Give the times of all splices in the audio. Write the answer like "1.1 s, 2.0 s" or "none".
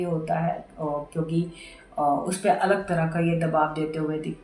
none